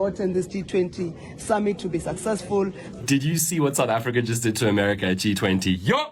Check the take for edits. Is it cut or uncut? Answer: cut